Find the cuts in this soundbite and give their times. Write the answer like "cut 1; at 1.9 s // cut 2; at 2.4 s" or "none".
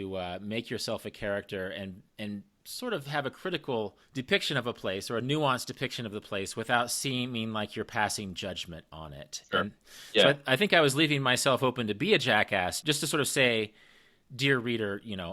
cut 1; at 2.6 s // cut 2; at 4.0 s // cut 3; at 12.8 s